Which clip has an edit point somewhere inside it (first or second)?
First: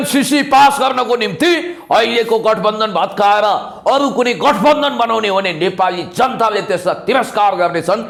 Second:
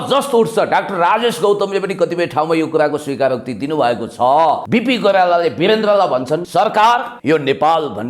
second